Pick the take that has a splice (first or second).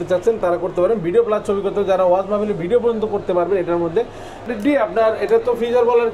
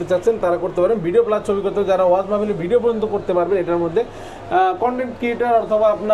first